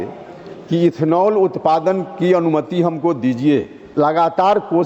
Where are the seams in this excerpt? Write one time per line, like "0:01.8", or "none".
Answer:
0:03.8